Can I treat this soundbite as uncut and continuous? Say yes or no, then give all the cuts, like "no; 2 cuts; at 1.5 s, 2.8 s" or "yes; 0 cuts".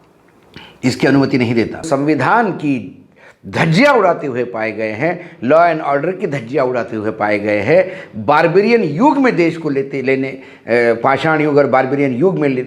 no; 1 cut; at 1.9 s